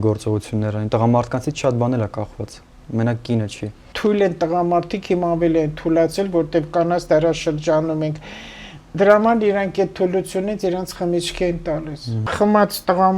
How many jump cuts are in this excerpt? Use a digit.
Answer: 2